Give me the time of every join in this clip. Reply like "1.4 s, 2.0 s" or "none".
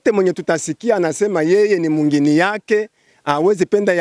none